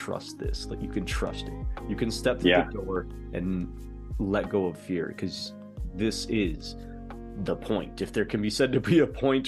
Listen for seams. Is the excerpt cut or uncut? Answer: uncut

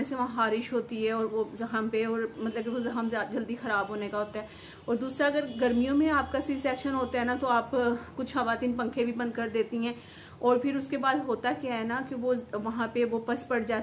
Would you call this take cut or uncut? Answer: uncut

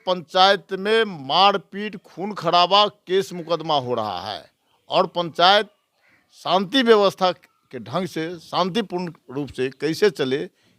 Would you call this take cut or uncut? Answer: uncut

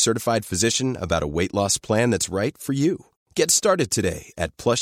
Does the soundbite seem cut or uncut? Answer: uncut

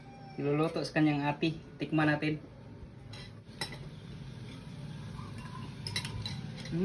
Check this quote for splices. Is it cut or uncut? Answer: cut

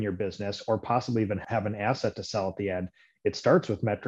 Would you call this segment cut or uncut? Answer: cut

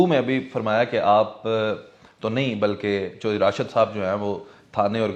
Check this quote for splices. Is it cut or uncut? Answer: uncut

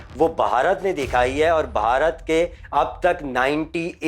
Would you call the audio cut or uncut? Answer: uncut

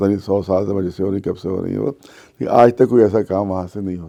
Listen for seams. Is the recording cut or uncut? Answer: uncut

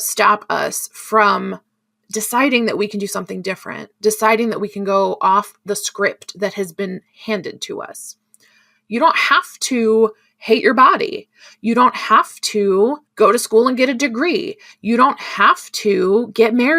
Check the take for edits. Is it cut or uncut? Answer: cut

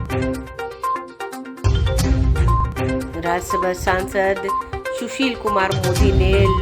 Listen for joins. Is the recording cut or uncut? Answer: cut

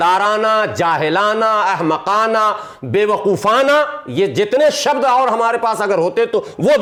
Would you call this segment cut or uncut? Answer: uncut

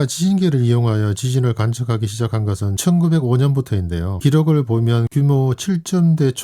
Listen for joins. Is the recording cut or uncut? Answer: uncut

